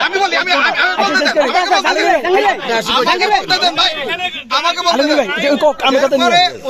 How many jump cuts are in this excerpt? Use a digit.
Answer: 0